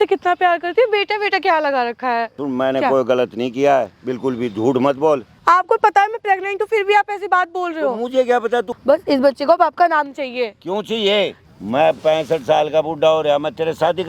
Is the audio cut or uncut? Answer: cut